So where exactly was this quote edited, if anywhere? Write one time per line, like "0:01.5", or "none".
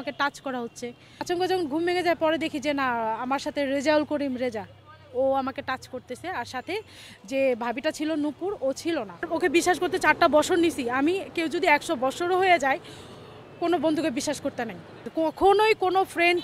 0:01.2
0:09.3
0:15.0

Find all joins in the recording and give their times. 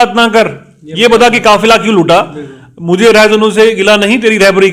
none

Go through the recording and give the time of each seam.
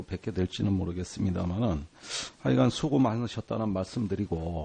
none

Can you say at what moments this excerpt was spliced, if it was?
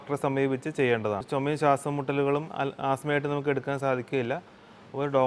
0:01.2

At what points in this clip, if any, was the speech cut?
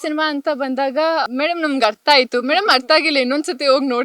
0:01.3

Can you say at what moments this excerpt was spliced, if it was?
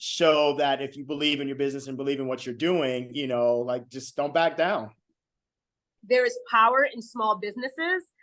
0:06.0

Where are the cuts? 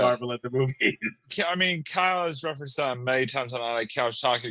0:01.3

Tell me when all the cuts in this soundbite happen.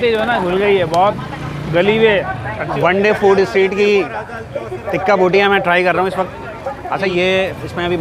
0:02.8
0:07.1

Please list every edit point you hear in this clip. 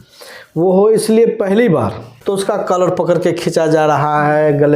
0:02.1

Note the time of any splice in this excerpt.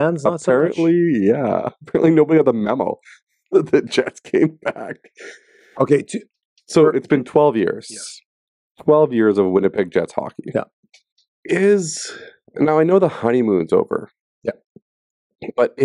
none

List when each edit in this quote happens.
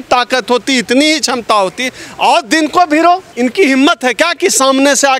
0:03.3

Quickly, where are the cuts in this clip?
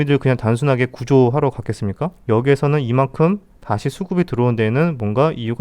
0:02.1

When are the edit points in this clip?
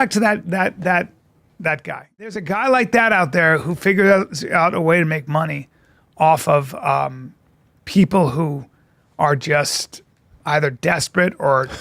0:02.4

